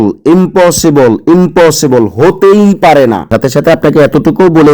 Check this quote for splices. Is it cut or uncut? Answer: cut